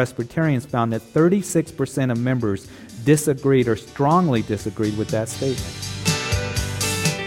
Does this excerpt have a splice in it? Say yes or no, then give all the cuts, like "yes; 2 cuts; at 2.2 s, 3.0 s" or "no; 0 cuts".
yes; 1 cut; at 5.8 s